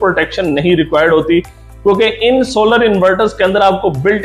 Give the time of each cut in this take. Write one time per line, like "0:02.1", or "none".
none